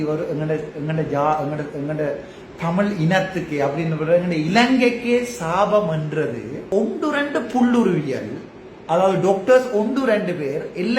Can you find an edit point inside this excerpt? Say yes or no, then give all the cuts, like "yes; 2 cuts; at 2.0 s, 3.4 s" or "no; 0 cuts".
yes; 1 cut; at 6.6 s